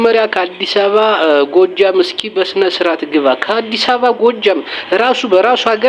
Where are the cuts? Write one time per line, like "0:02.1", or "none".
none